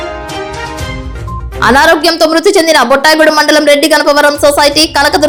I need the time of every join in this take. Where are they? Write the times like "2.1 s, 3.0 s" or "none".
none